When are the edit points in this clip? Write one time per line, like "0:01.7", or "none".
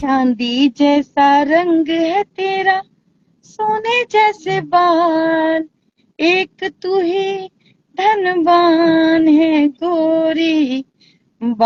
none

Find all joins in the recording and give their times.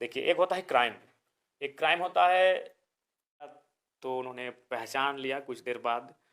0:03.7

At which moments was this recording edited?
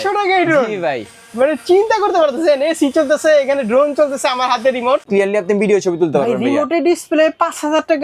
0:05.1

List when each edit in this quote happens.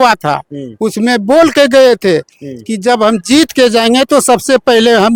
none

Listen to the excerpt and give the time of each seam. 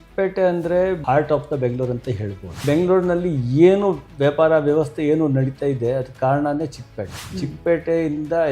0:01.0
0:02.6

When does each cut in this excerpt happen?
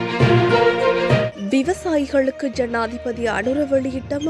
0:01.3

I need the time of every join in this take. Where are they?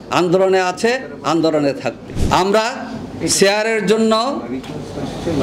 0:02.1

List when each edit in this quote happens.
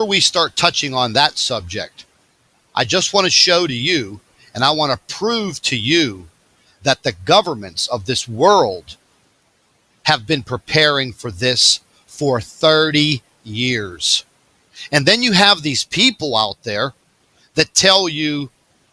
none

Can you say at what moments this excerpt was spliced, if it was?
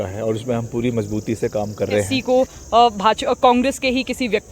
0:02.1

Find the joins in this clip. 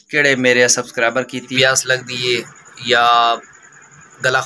0:01.4

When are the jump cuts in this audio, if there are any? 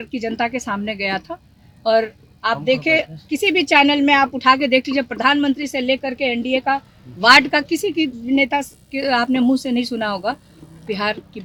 none

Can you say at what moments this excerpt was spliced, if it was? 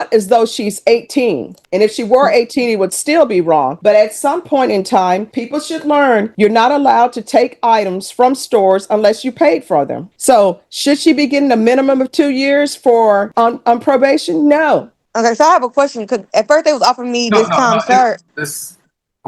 none

